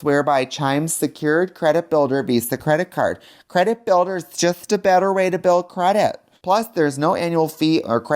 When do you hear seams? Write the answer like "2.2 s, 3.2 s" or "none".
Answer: 6.3 s